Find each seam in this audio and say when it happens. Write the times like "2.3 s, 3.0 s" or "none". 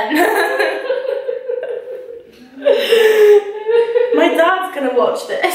none